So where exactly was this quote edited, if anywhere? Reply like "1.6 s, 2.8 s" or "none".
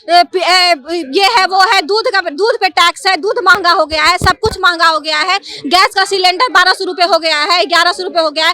none